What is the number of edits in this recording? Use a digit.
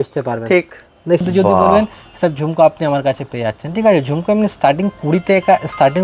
1